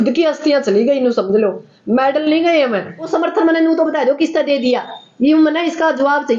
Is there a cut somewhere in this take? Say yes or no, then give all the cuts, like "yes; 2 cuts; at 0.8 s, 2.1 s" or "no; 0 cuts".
yes; 1 cut; at 3.1 s